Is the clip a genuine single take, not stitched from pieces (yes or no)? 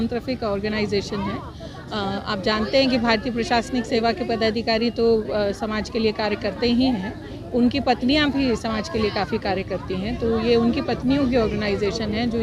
yes